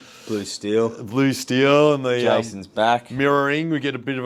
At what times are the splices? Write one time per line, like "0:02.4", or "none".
none